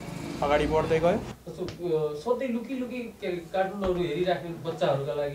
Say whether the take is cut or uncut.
cut